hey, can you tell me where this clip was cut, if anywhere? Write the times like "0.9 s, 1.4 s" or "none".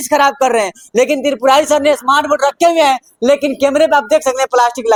none